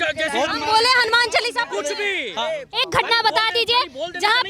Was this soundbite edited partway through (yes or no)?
yes